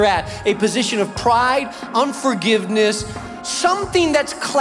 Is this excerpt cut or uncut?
cut